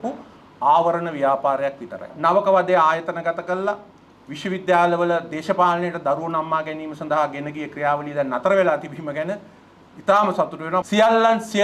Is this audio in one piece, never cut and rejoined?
no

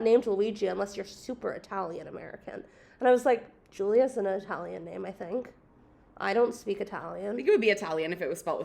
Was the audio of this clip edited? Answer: no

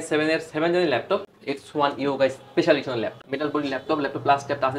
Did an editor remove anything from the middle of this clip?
yes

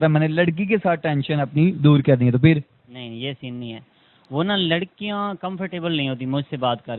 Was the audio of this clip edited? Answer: no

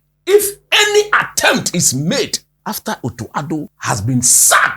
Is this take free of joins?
no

